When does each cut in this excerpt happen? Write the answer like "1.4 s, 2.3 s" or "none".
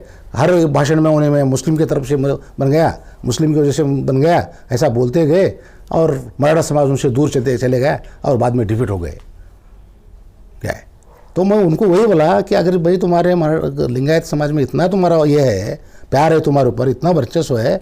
none